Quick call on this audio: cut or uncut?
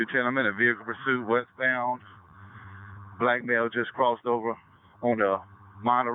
uncut